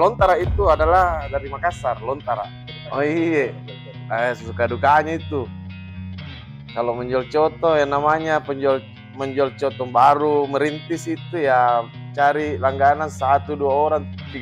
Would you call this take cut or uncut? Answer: cut